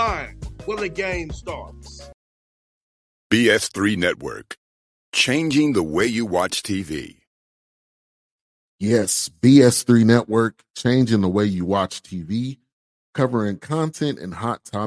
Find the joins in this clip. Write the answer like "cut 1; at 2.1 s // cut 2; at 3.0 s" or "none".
cut 1; at 2.0 s